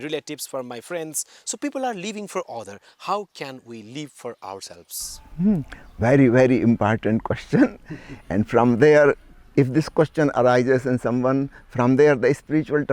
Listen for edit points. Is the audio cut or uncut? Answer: uncut